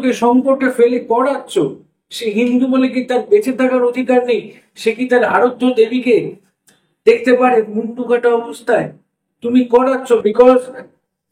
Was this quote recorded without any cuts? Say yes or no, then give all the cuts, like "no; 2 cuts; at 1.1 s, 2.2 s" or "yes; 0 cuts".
yes; 0 cuts